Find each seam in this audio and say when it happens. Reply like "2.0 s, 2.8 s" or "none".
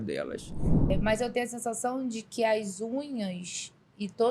0.9 s